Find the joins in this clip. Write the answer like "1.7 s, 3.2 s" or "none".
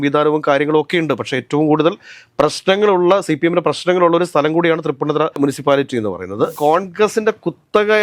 6.6 s

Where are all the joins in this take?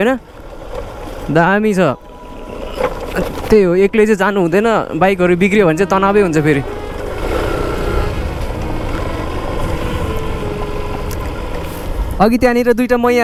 none

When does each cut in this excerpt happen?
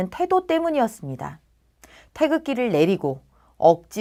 none

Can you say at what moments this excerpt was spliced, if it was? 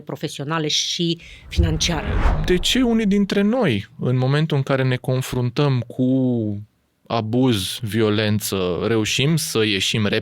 2.3 s

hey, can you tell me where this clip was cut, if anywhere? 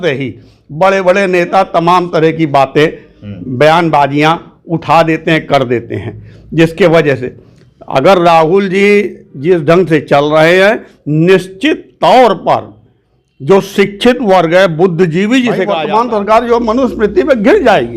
15.7 s

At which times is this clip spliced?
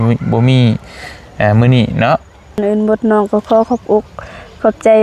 2.6 s

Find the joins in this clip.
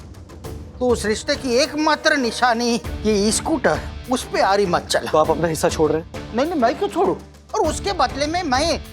5.1 s, 7.3 s

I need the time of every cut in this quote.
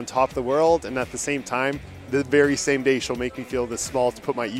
none

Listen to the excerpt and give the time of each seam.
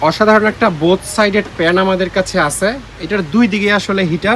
none

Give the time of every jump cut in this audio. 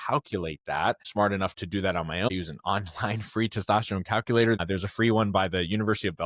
1.0 s, 2.3 s, 4.6 s

